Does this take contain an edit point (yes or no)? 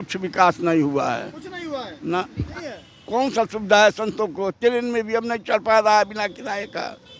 yes